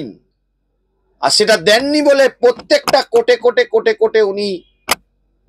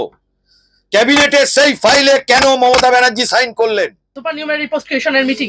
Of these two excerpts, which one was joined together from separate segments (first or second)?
second